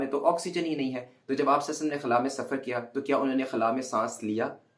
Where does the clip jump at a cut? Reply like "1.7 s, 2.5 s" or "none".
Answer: none